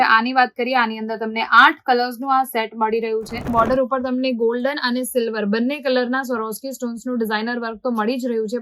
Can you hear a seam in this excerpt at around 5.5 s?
no; 1 cut; at 3.4 s

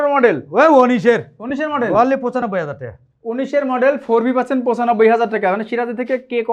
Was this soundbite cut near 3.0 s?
no; 0 cuts

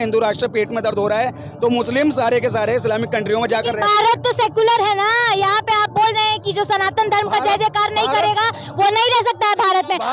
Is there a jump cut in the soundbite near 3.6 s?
no; 0 cuts

